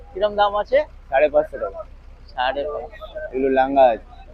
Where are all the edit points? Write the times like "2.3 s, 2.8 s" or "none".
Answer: none